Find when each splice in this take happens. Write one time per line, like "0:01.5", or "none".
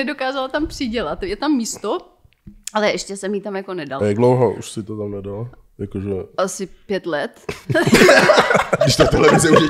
none